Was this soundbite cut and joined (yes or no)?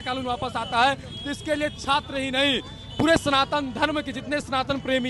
no